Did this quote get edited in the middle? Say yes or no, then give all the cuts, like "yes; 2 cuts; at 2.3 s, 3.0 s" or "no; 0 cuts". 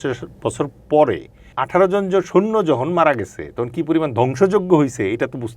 yes; 1 cut; at 1.5 s